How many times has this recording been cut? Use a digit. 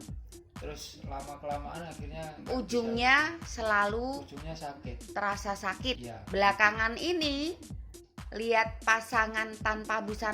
1